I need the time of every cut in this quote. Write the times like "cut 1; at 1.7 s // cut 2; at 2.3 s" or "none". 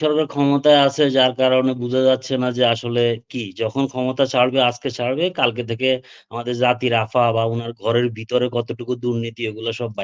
none

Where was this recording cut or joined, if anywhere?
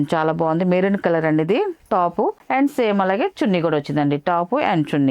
none

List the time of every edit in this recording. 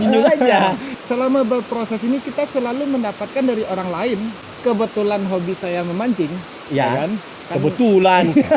cut 1; at 0.9 s // cut 2; at 4.4 s

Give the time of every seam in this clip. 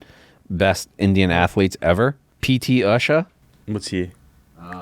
cut 1; at 2.3 s // cut 2; at 3.5 s

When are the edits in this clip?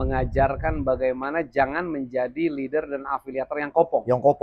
none

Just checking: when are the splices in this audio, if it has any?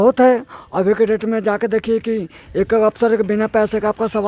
none

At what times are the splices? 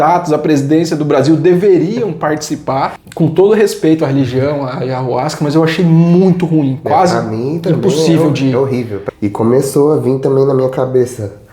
cut 1; at 3.0 s // cut 2; at 9.0 s

